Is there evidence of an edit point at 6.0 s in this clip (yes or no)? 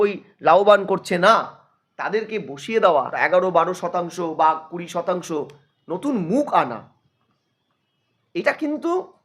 no